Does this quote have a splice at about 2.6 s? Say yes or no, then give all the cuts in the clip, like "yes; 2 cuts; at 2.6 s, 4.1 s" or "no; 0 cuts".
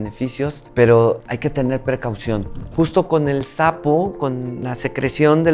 yes; 1 cut; at 2.6 s